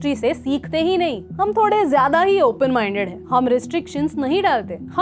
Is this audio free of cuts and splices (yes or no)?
no